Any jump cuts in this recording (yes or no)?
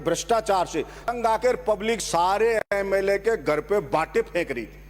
yes